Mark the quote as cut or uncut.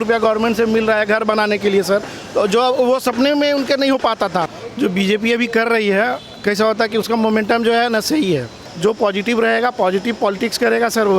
cut